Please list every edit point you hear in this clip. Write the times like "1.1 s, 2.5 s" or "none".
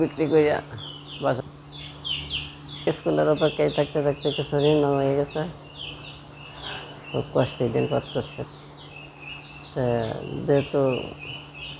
1.4 s